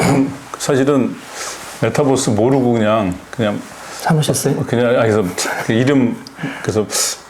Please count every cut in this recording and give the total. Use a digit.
0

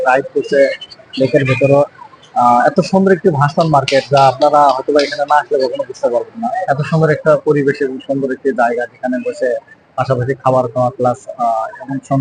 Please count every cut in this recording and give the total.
1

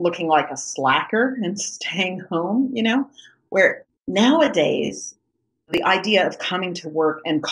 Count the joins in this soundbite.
2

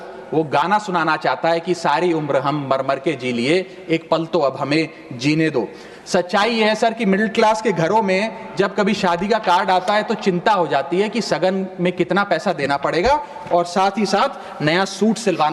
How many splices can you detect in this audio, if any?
0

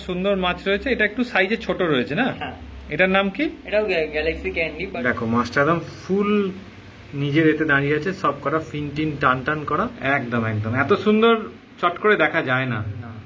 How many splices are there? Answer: 2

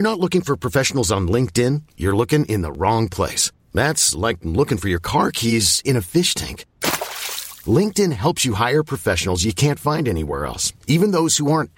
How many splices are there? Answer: 0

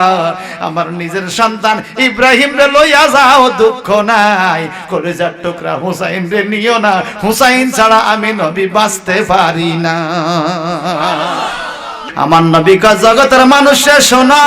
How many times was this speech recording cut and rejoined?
1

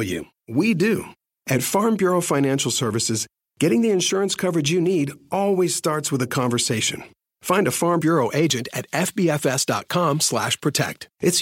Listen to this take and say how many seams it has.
1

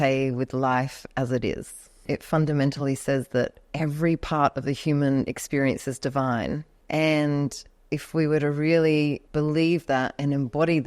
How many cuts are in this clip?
4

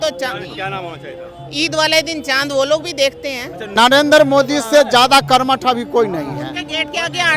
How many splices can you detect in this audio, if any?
1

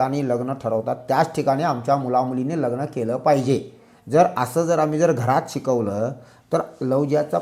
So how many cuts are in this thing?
0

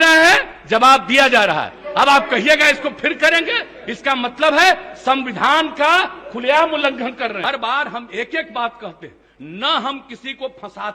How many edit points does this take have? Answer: 1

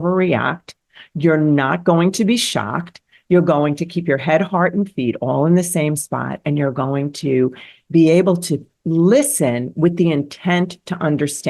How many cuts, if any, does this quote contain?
0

